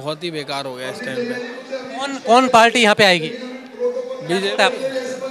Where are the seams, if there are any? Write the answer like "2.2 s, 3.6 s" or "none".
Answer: none

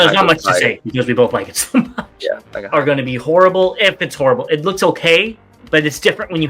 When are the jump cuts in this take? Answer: 2.5 s

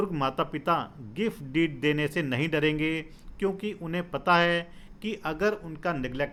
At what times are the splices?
none

